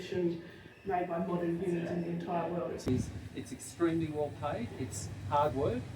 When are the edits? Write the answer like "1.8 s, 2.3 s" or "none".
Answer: 2.9 s